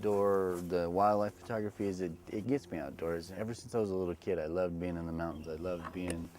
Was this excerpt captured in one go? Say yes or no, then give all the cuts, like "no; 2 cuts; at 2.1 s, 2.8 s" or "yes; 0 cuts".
no; 1 cut; at 3.3 s